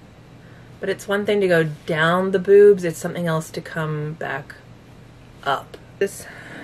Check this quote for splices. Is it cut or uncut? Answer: uncut